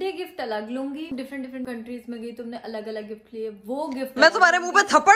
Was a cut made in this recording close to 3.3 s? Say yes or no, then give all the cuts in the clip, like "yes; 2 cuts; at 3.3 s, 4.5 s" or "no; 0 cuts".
no; 1 cut; at 1.4 s